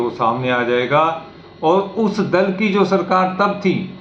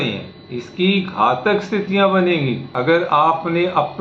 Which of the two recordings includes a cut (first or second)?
second